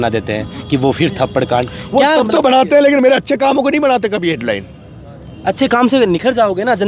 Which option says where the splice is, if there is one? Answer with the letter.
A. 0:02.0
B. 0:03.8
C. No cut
C